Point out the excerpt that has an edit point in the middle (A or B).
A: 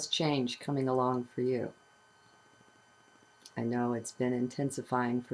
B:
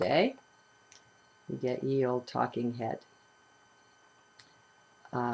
A